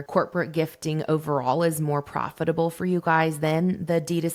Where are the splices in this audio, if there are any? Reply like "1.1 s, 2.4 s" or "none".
none